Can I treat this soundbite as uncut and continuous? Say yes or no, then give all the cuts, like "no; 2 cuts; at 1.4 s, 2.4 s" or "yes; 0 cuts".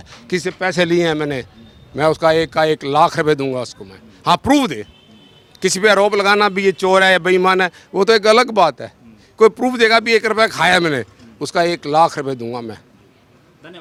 yes; 0 cuts